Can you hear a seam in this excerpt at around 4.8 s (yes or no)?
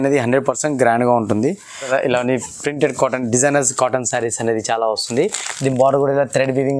no